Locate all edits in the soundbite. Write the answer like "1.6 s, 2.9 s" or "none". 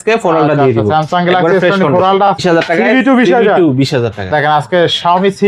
2.4 s